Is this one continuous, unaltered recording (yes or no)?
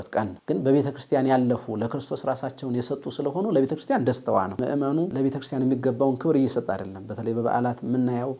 no